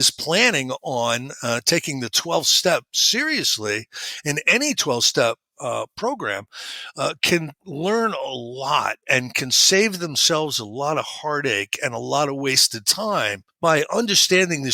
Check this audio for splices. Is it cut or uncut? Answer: cut